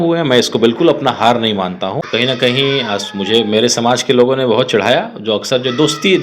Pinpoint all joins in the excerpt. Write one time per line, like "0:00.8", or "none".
0:02.0

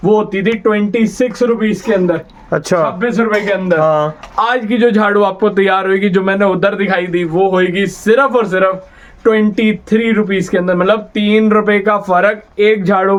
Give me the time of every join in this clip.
none

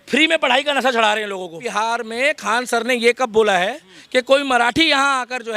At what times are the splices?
0:01.6

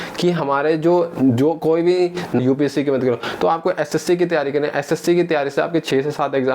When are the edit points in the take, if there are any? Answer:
0:02.4

